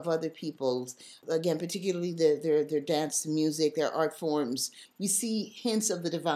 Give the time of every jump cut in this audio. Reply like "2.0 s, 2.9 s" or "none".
1.2 s, 4.8 s

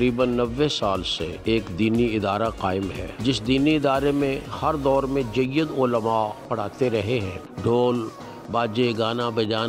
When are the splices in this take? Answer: 1.2 s, 3.1 s, 7.4 s

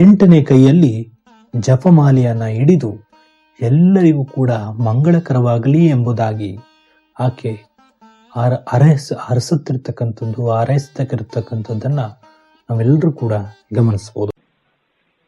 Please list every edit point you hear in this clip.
14.3 s

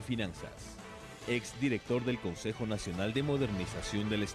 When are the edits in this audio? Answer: 1.0 s

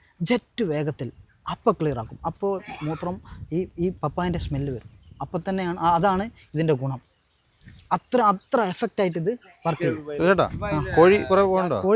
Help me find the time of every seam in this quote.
9.9 s

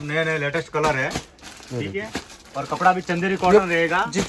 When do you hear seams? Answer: none

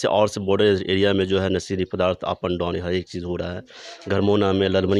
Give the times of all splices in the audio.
3.8 s

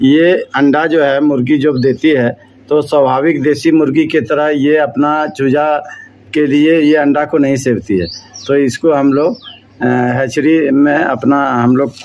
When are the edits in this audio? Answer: none

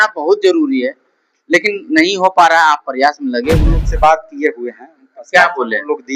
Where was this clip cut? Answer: 3.9 s

